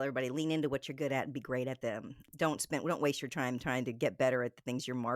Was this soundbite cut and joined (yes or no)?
yes